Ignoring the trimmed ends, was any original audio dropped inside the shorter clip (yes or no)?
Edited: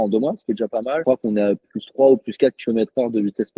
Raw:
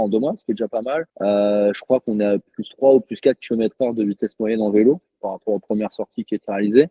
yes